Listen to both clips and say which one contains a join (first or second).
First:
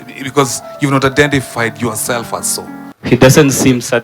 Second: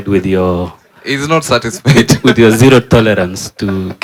first